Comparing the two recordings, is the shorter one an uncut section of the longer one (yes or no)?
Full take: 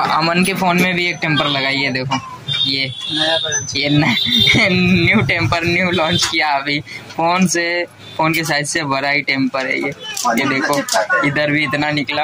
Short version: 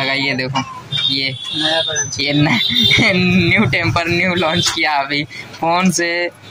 yes